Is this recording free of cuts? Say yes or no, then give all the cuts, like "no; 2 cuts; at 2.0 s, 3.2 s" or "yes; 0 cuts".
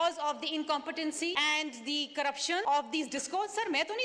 no; 2 cuts; at 1.3 s, 2.6 s